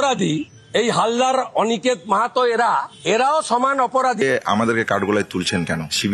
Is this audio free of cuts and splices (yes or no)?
no